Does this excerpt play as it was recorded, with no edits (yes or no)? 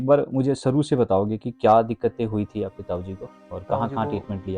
yes